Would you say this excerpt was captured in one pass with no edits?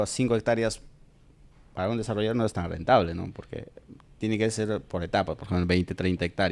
yes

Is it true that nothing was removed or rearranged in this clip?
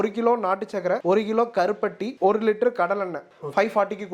no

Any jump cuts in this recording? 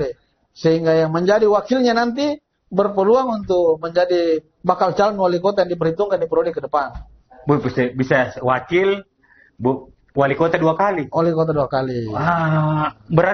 no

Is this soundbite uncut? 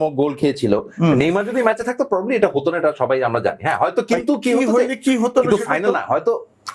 yes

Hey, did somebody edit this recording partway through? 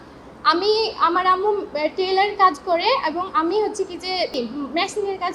yes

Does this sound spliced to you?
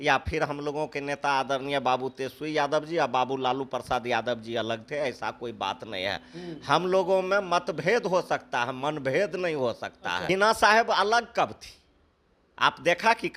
yes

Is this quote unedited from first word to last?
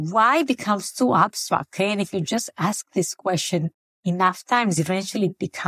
yes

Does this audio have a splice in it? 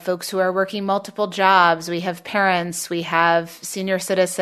no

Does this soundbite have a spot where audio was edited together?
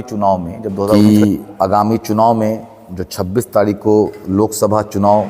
yes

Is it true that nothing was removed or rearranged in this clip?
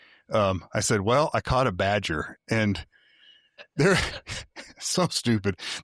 yes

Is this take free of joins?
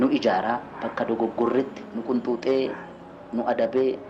no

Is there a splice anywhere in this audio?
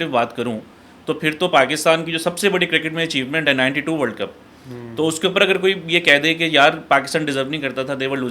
no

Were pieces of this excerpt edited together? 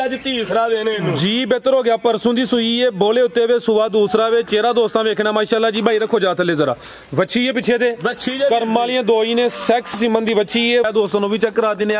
yes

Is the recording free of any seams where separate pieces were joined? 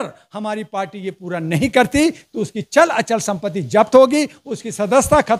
yes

